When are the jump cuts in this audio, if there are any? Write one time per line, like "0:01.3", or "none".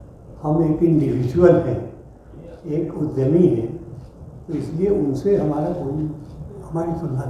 none